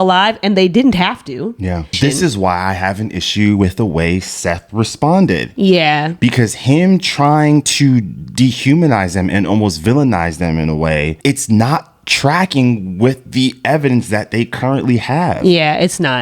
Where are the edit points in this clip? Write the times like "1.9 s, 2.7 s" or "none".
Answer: 1.9 s, 11.2 s